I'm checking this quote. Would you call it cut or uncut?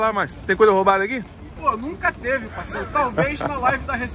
cut